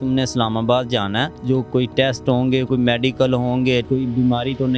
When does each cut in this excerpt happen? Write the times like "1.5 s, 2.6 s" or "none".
1.4 s, 3.9 s